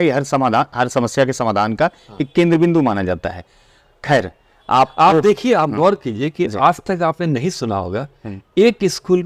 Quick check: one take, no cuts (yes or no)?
yes